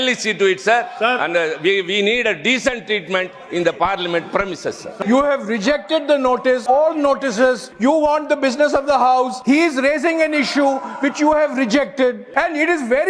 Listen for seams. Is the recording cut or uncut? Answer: cut